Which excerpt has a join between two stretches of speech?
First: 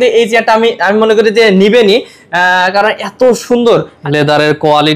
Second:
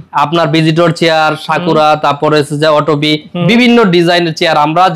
first; 1 cut; at 3.9 s

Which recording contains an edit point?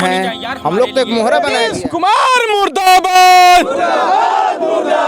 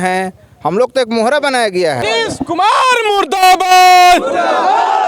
first; 1 cut; at 1.6 s

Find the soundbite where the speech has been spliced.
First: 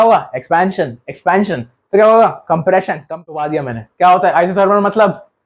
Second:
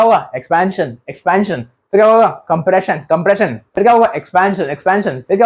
first; 1 cut; at 3.0 s

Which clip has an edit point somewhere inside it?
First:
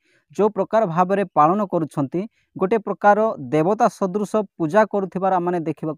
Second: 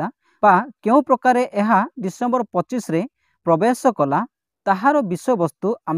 second; 1 cut; at 3.2 s

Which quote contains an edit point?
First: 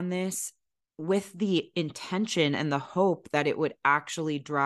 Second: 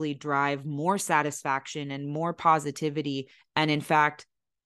second; 1 cut; at 3.3 s

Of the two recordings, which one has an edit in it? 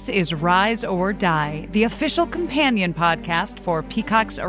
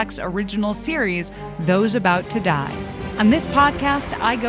second; 1 cut; at 3.0 s

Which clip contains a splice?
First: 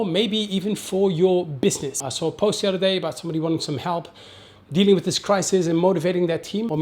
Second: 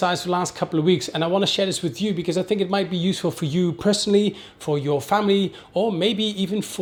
first; 1 cut; at 2.0 s

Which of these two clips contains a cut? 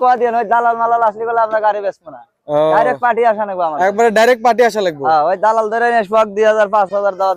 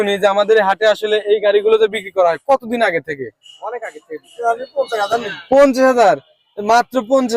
second; 1 cut; at 4.3 s

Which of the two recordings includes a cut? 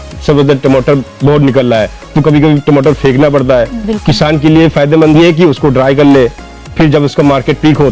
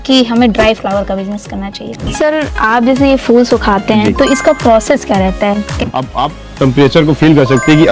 second; 2 cuts; at 2.1 s, 5.7 s

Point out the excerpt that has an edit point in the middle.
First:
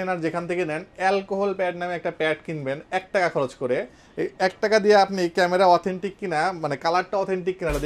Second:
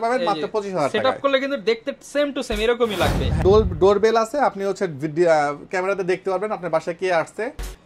second; 1 cut; at 3.4 s

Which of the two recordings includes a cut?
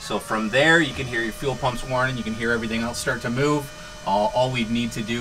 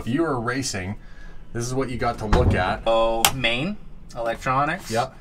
second; 1 cut; at 2.9 s

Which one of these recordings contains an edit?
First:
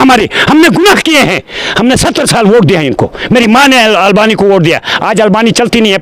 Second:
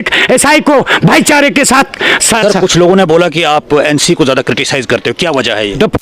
second; 1 cut; at 2.3 s

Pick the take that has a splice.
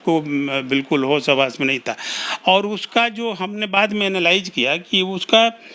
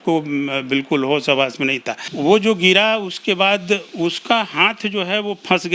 second; 1 cut; at 2.0 s

